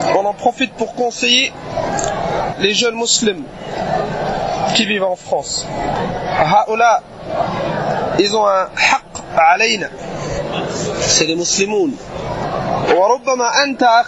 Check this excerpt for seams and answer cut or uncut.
cut